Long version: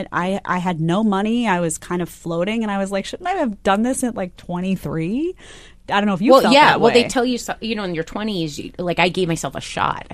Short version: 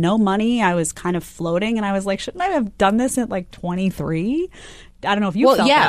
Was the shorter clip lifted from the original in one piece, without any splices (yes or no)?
yes